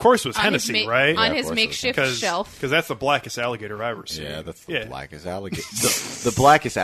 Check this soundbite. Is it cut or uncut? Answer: uncut